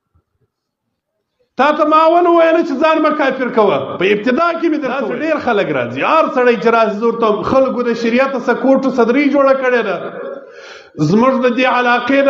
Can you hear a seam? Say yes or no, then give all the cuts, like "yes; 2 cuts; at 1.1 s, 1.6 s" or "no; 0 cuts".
yes; 1 cut; at 4.9 s